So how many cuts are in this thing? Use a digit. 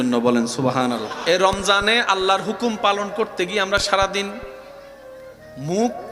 1